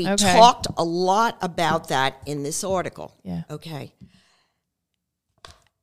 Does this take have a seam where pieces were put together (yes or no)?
no